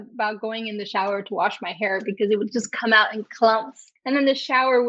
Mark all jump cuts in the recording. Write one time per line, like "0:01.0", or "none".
none